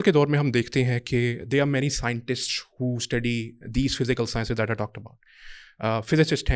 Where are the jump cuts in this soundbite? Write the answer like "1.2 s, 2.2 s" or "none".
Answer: none